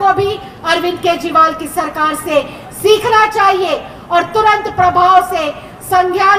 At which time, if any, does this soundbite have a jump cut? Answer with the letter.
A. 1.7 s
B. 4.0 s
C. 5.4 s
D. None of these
D